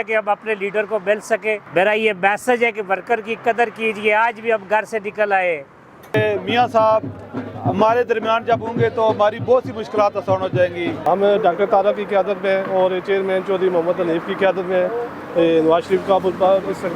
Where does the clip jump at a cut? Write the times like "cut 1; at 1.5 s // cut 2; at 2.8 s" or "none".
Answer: cut 1; at 6.1 s // cut 2; at 11.0 s